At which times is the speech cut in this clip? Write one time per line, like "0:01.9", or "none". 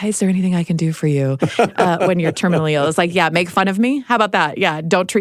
none